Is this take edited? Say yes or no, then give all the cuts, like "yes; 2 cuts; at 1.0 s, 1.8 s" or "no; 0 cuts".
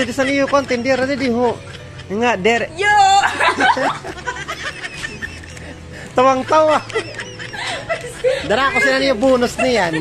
no; 0 cuts